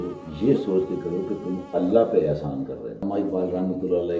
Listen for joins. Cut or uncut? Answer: cut